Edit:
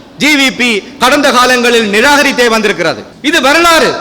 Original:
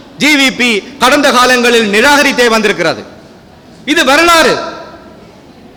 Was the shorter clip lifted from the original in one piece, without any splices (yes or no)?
no